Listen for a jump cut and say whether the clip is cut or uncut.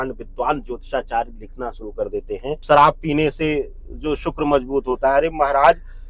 cut